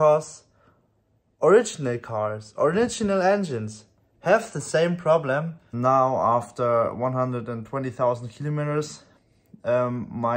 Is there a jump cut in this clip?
yes; 1 cut; at 5.7 s

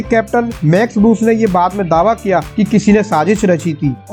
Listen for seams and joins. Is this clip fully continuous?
yes; 0 cuts

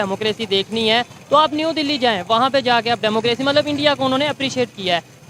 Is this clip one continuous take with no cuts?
yes; 0 cuts

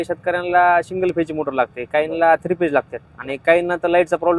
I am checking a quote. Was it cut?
no; 0 cuts

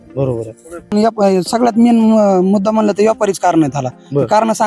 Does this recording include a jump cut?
yes; 1 cut; at 0.9 s

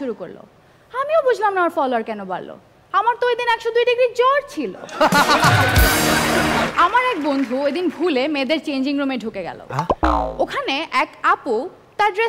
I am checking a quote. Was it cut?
yes; 1 cut; at 6.7 s

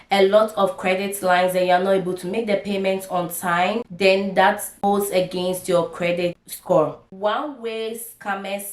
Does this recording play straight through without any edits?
no; 4 cuts; at 3.9 s, 4.8 s, 6.4 s, 7.1 s

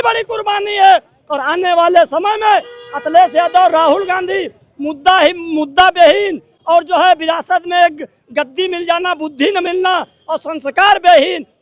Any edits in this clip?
no; 0 cuts

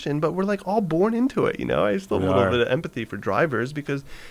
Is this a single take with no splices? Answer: yes; 0 cuts

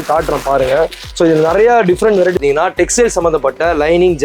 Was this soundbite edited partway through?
yes; 1 cut; at 2.4 s

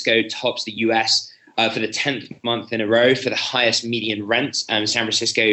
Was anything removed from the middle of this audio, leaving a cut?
no; 0 cuts

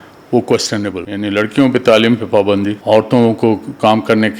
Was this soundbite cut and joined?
yes; 2 cuts; at 1.0 s, 2.8 s

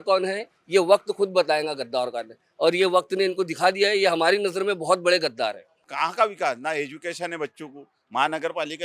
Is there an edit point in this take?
yes; 1 cut; at 5.8 s

